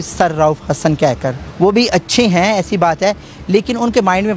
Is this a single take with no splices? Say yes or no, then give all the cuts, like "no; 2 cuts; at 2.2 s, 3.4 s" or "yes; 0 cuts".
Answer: no; 1 cut; at 1.4 s